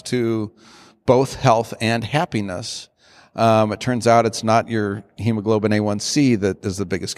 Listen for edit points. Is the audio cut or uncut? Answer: uncut